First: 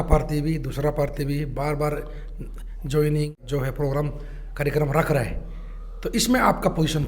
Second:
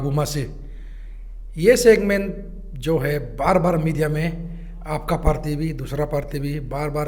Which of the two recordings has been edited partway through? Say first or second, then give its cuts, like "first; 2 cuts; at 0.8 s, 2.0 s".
first; 1 cut; at 3.4 s